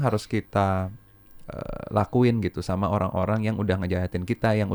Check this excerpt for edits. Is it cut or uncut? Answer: uncut